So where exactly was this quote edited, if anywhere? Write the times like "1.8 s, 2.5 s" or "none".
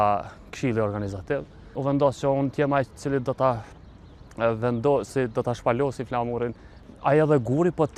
1.7 s, 6.8 s